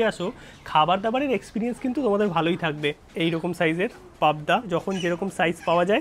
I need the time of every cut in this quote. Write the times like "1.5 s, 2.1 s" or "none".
3.0 s, 4.7 s